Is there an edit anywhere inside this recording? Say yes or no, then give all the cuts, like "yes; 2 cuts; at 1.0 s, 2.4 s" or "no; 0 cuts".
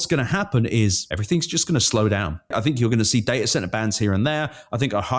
yes; 2 cuts; at 1.1 s, 2.5 s